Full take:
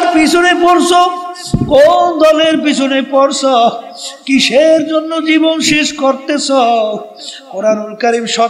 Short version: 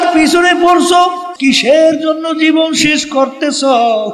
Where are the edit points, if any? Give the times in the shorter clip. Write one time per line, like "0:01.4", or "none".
0:01.3